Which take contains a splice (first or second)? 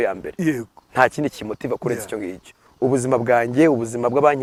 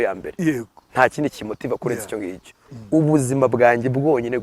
second